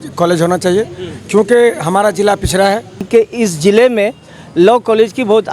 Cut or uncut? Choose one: cut